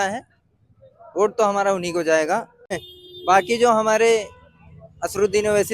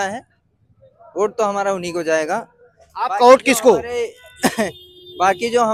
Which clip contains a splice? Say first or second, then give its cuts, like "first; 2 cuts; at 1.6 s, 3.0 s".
first; 1 cut; at 2.9 s